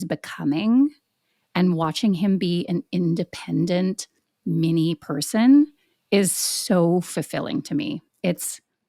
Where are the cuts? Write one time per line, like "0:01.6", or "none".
none

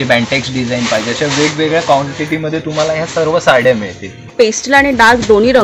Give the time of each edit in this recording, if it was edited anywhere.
0:04.3

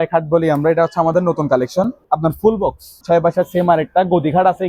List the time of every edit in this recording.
0:02.0
0:03.0

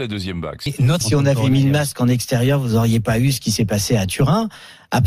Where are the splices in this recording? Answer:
0:01.0

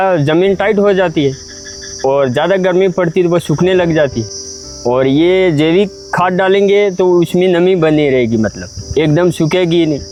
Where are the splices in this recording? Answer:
none

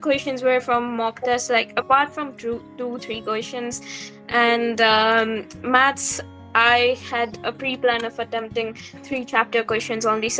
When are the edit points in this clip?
none

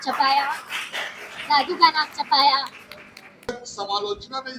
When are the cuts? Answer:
0:03.5

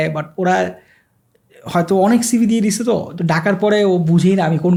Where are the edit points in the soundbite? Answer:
none

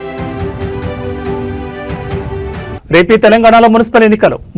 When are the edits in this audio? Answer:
0:01.7

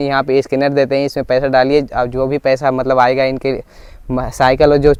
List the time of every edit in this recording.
none

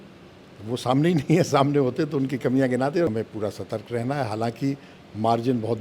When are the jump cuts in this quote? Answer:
0:03.1

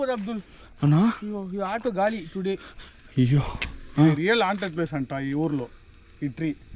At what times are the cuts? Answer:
0:03.8

